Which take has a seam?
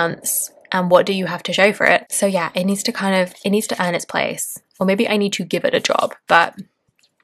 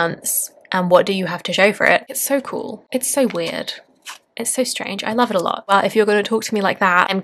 second; 2 cuts; at 2.1 s, 5.7 s

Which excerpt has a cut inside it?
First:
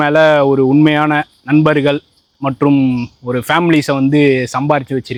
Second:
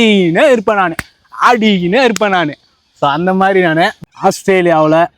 second; 1 cut; at 4.0 s

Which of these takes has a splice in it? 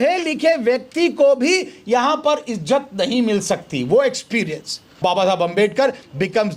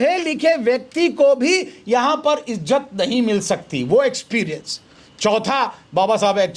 first; 1 cut; at 5.0 s

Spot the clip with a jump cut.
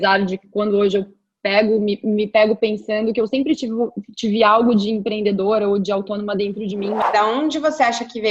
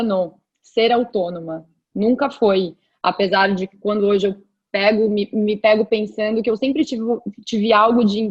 first; 1 cut; at 7.0 s

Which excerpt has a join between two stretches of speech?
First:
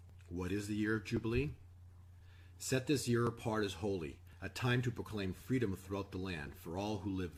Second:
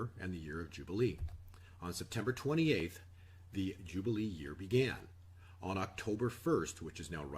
second; 1 cut; at 5.0 s

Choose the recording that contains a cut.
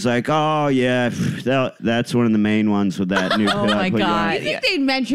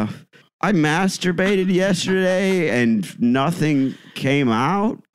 first; 1 cut; at 1.8 s

